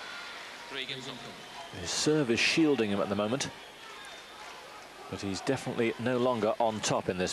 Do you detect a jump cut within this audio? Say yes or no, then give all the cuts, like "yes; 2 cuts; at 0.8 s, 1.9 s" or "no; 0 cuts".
no; 0 cuts